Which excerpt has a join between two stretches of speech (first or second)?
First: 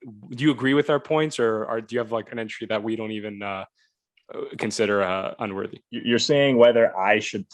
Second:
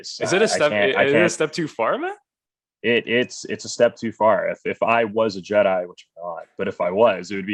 first